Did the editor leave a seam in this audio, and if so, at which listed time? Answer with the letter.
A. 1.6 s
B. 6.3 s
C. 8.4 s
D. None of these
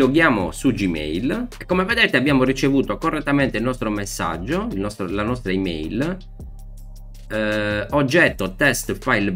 A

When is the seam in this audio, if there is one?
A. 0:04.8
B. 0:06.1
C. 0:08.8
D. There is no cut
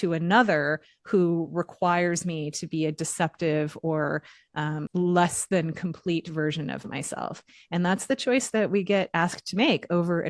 A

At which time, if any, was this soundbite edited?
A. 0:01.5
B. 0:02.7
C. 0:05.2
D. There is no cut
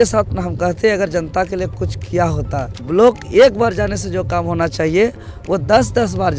B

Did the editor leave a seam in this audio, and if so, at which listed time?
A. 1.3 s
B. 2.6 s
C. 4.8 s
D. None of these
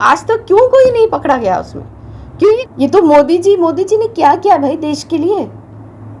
B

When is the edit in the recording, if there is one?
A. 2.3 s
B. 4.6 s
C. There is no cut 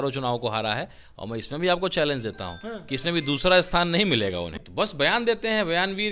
B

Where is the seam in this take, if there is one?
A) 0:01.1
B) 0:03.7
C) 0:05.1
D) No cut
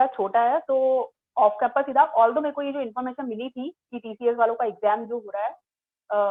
D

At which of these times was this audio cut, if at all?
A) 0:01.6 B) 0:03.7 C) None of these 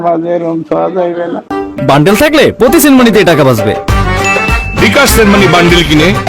A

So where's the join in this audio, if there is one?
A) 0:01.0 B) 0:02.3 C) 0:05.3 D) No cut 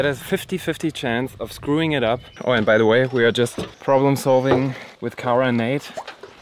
B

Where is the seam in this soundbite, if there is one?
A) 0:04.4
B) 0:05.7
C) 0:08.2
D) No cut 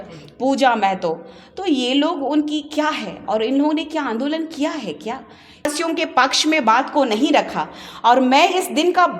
B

